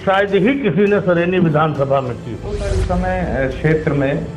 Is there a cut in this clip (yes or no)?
yes